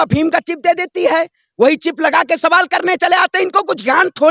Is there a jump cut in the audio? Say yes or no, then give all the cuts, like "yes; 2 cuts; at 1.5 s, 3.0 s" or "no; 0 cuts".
no; 0 cuts